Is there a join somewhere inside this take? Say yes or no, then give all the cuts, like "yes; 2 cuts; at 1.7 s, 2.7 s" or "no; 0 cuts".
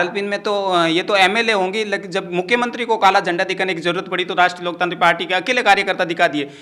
no; 0 cuts